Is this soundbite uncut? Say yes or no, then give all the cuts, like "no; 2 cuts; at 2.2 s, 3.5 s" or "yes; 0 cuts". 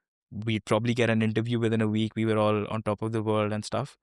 yes; 0 cuts